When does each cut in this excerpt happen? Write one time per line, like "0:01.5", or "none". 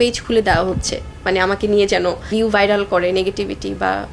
0:02.3